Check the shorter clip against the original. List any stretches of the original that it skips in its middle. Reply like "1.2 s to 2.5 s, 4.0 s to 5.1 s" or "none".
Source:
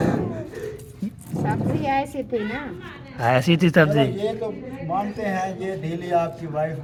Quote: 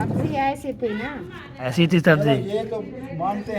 3.2 s to 3.4 s